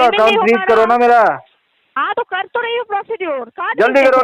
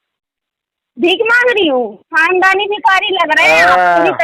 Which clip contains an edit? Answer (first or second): second